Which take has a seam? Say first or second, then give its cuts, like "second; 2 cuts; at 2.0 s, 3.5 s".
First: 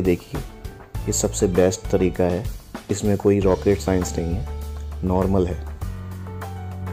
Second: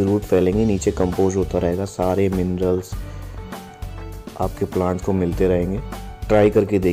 first; 1 cut; at 6.0 s